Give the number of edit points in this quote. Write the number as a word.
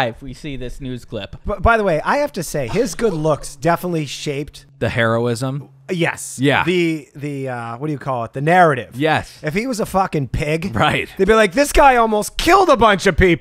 one